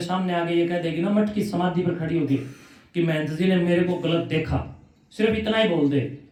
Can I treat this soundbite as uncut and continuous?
yes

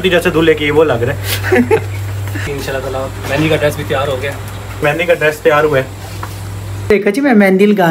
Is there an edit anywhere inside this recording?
yes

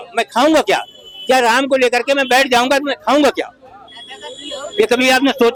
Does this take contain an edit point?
no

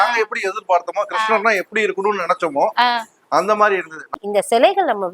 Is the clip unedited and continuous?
no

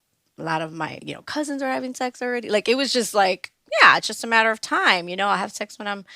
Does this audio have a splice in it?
yes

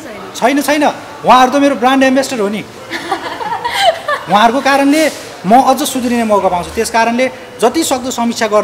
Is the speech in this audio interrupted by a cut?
no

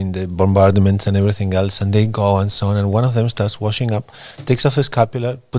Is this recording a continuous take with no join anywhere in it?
yes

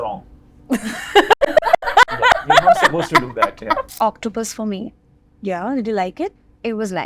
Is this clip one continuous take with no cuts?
no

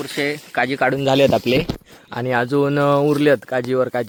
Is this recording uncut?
yes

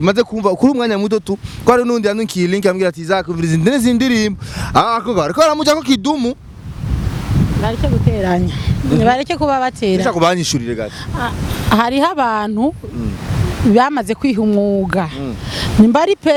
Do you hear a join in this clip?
no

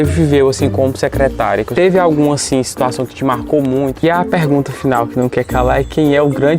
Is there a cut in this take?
yes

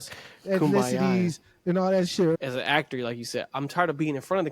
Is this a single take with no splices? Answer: no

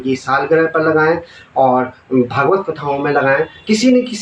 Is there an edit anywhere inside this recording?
no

